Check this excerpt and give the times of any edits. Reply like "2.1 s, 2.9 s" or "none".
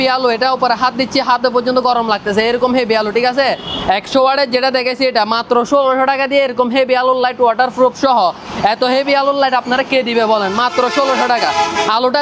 none